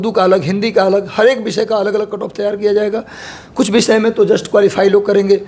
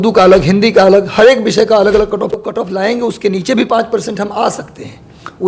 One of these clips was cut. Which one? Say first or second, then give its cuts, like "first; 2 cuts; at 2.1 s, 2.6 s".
second; 1 cut; at 2.4 s